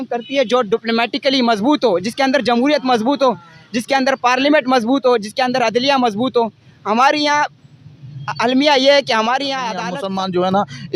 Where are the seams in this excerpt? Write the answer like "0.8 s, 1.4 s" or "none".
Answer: 9.7 s